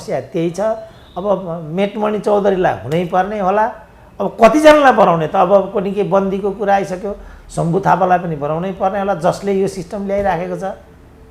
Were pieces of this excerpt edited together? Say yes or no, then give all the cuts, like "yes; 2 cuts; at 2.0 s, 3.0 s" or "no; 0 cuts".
no; 0 cuts